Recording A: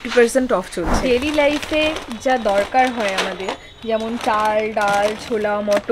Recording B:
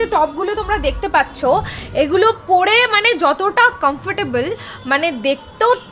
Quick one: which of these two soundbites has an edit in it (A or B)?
A